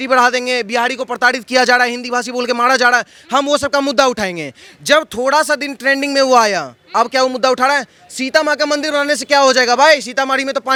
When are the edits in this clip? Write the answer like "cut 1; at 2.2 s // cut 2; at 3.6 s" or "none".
none